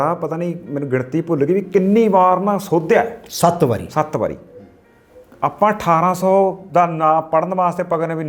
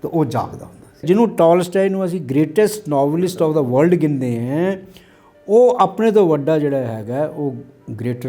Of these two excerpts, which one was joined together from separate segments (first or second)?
second